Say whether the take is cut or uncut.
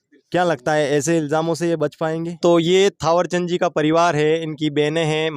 cut